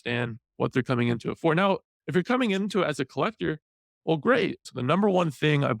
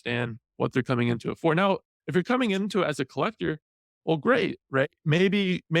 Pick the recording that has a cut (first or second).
first